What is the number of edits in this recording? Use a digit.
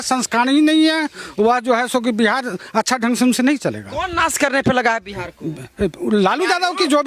0